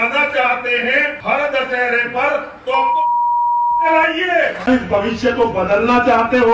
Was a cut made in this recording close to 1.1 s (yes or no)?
yes